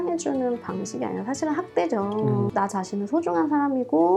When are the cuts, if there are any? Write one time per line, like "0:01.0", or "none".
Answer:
0:02.5

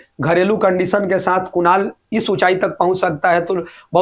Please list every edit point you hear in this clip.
none

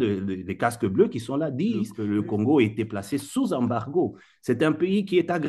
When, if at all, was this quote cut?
0:02.0

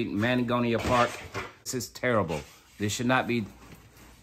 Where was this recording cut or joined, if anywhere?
0:01.8

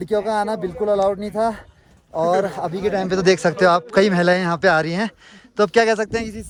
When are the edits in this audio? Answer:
none

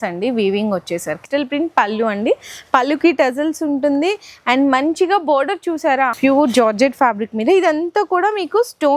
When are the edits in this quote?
0:01.2
0:06.1

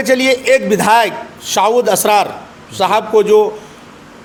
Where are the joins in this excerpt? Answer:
none

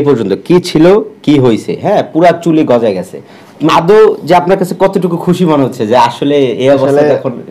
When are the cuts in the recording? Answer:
none

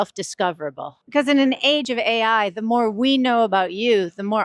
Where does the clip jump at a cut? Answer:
0:00.9
0:01.8

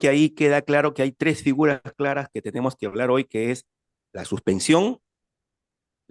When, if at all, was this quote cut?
none

